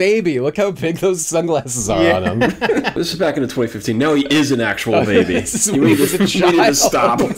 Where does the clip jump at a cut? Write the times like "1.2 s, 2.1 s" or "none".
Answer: none